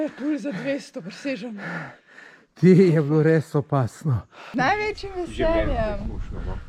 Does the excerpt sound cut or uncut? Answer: cut